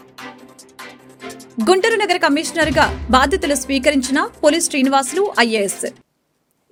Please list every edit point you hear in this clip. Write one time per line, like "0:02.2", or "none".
none